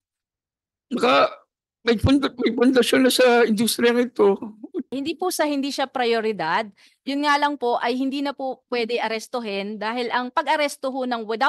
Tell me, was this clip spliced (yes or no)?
yes